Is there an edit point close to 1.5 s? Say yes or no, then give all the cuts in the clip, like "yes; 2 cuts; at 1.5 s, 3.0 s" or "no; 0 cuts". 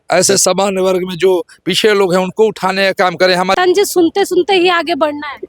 no; 1 cut; at 3.5 s